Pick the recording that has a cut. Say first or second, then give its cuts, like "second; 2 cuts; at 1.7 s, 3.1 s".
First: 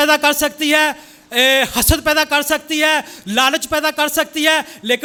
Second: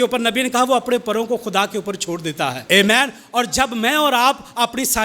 second; 1 cut; at 2.6 s